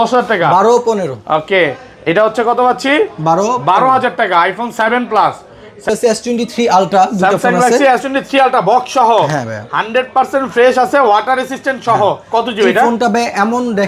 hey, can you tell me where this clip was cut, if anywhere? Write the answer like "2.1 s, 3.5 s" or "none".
5.9 s